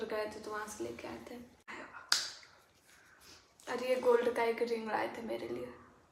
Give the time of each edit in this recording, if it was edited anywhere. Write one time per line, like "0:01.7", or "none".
0:01.7